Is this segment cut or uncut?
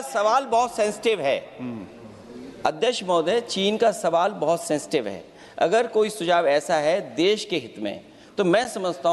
uncut